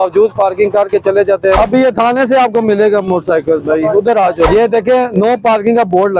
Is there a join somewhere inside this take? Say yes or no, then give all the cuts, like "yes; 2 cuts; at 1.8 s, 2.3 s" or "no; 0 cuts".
yes; 2 cuts; at 1.6 s, 4.5 s